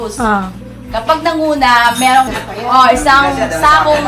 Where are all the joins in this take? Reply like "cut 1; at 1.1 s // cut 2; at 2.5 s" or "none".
cut 1; at 2.3 s